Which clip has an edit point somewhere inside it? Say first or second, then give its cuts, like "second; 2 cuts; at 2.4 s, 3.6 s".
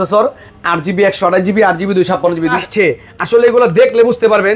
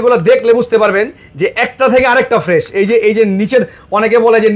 first; 1 cut; at 2.6 s